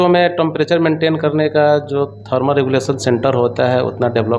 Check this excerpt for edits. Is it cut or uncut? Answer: uncut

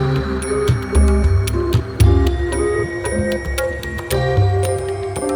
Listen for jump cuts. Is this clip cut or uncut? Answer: uncut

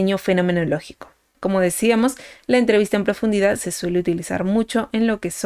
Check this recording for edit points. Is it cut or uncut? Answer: cut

